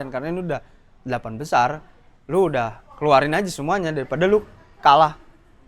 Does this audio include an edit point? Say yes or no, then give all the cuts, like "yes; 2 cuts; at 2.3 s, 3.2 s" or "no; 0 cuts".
no; 0 cuts